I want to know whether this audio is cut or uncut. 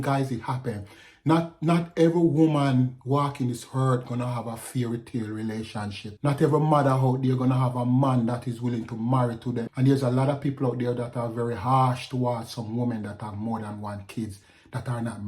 cut